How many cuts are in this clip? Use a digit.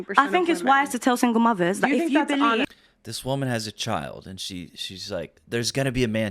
1